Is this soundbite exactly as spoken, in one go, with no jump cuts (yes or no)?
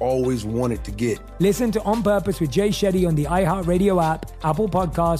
no